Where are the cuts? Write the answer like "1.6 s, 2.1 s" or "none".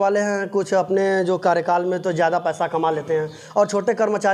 none